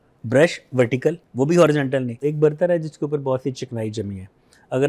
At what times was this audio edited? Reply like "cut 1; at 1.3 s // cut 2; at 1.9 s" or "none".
cut 1; at 2.1 s